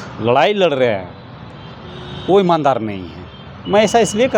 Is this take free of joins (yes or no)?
yes